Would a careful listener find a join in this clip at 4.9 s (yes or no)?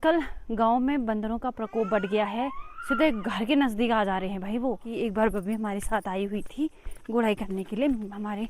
yes